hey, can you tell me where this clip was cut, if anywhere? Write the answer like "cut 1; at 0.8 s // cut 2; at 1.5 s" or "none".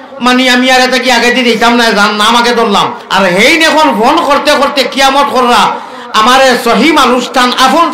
cut 1; at 3.0 s